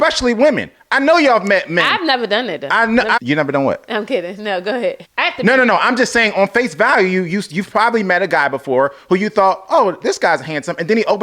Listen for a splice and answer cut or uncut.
cut